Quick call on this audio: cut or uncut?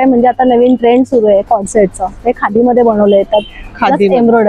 uncut